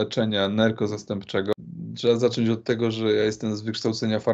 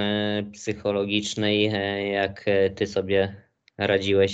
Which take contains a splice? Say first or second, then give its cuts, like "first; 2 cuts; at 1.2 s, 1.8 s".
first; 1 cut; at 1.5 s